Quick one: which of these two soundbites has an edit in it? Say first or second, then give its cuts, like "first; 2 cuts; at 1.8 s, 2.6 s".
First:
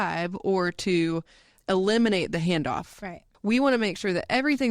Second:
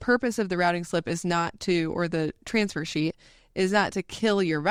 first; 1 cut; at 3.3 s